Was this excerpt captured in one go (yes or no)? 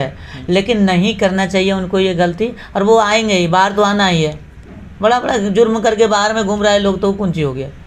yes